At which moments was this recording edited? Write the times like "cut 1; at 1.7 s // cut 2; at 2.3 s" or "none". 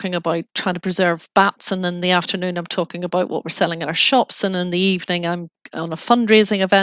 none